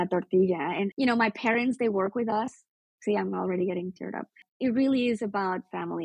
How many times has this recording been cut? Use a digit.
2